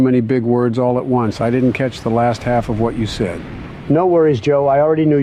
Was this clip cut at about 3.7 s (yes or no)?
no